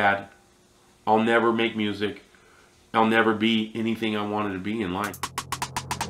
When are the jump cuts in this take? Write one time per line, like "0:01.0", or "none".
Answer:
0:05.2